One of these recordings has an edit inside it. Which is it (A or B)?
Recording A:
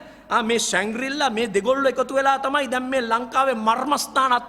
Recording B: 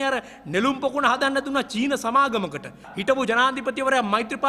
B